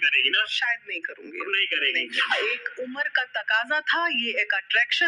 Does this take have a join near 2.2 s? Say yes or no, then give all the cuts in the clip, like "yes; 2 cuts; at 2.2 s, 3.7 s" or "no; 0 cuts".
yes; 1 cut; at 2.2 s